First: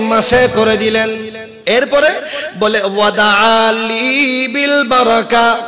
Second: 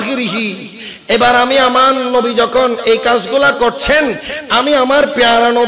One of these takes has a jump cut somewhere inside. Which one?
first; 1 cut; at 1.4 s

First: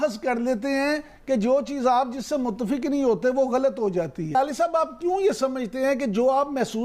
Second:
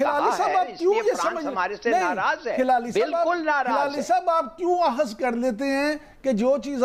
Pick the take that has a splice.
first; 1 cut; at 4.3 s

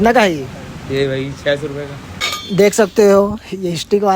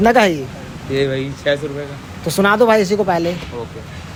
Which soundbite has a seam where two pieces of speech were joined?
first; 1 cut; at 2.0 s

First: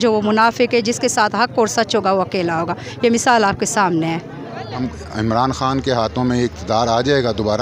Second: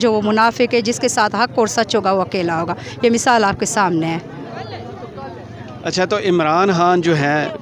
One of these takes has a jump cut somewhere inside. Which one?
first; 1 cut; at 4.8 s

